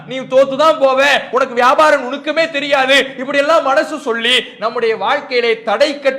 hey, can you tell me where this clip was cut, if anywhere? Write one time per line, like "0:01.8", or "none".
0:01.3